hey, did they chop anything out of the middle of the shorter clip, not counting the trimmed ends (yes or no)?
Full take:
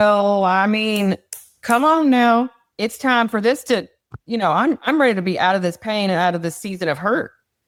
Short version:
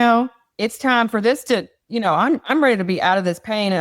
yes